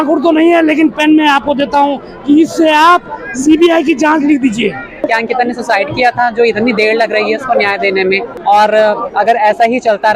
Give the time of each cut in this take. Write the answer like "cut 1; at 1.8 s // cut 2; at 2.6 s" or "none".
cut 1; at 5.0 s // cut 2; at 8.3 s